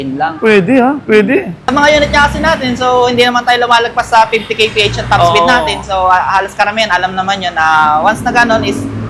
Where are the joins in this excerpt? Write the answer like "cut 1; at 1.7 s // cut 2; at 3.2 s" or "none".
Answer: cut 1; at 1.6 s